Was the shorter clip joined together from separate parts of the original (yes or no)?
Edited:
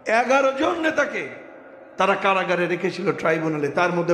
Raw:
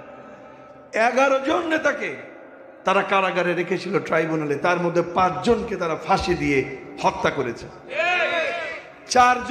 no